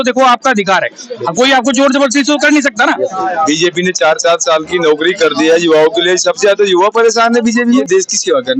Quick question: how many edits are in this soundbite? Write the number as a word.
two